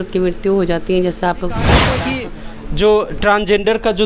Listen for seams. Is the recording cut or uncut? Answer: cut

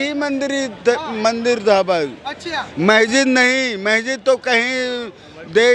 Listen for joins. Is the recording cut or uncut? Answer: uncut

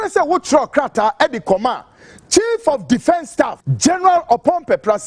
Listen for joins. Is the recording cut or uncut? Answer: cut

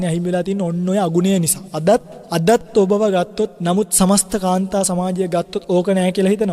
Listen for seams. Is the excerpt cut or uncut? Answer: cut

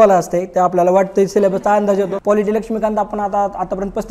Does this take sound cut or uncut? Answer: cut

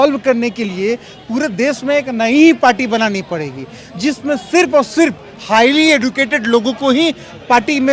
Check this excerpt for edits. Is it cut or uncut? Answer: uncut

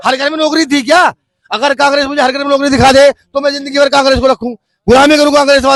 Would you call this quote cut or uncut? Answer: uncut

